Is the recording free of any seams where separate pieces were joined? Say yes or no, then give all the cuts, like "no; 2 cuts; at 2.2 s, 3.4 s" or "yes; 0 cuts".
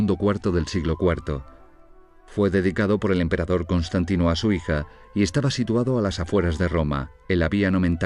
no; 1 cut; at 3.7 s